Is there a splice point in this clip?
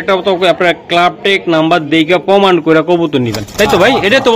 no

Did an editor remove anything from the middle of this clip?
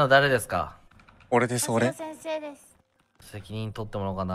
no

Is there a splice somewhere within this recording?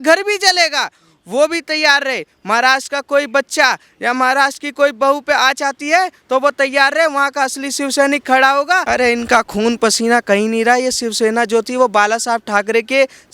yes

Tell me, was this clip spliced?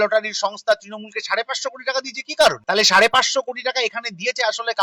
yes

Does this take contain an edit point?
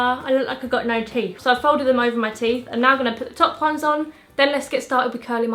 no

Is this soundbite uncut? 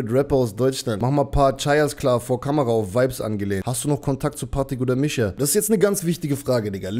no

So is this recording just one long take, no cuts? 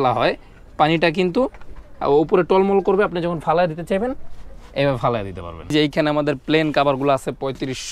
no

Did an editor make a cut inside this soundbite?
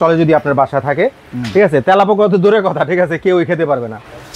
no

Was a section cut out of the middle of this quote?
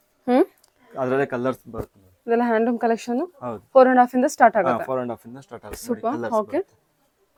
no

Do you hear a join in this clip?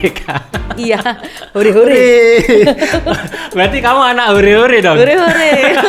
no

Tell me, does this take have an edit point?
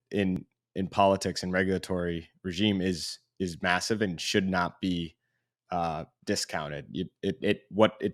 no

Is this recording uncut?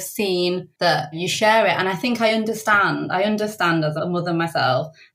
yes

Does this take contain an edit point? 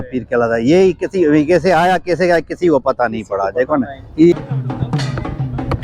yes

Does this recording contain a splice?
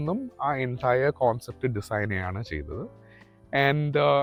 no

